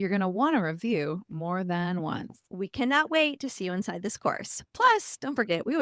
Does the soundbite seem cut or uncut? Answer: cut